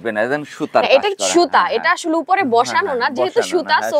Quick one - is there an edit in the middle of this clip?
no; 0 cuts

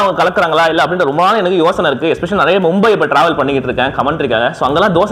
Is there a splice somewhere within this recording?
no; 0 cuts

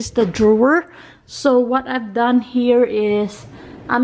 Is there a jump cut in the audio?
no; 0 cuts

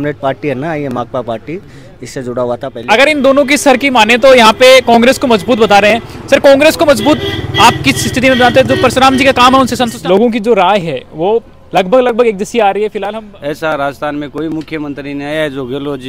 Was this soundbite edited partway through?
yes; 3 cuts; at 2.7 s, 9.9 s, 13.1 s

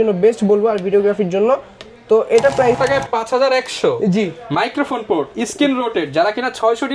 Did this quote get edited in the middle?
yes; 1 cut; at 2.8 s

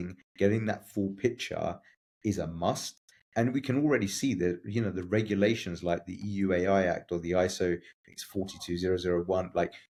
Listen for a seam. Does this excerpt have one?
no; 0 cuts

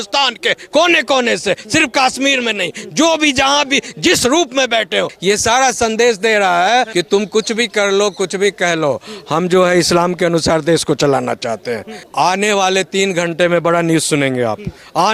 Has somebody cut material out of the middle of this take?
yes; 3 cuts; at 5.1 s, 6.9 s, 12.0 s

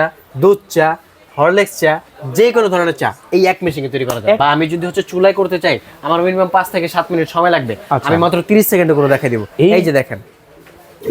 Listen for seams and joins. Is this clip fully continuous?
no; 1 cut; at 4.4 s

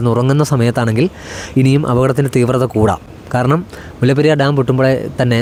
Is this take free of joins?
yes; 0 cuts

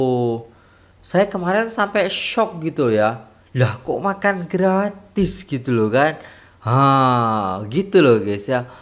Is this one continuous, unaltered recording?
yes; 0 cuts

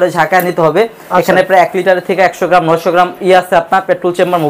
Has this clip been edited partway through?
no; 0 cuts

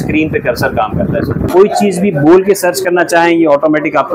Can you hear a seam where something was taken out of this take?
yes; 1 cut; at 1.5 s

